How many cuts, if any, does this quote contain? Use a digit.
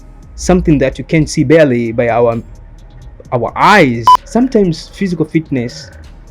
1